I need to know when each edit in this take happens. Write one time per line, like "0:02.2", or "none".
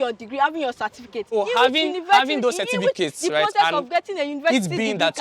0:01.3